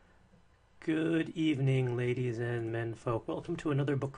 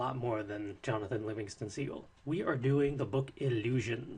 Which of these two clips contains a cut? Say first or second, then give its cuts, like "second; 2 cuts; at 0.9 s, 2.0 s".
first; 1 cut; at 2.9 s